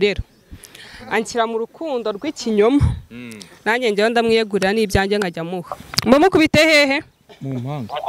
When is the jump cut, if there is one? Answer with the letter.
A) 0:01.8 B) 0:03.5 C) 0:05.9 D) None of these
C